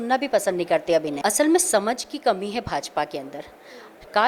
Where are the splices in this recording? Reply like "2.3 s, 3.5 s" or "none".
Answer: 1.1 s